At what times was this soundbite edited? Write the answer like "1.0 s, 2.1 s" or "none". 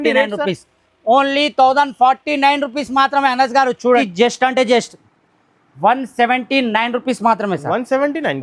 4.1 s